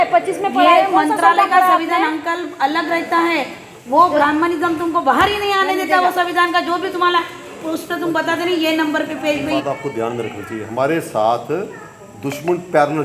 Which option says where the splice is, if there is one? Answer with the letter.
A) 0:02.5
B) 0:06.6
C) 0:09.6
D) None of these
C